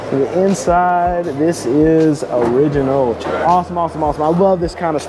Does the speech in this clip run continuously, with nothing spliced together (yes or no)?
no